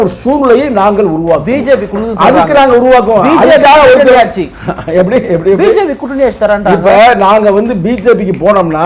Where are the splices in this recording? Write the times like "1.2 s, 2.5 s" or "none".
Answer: none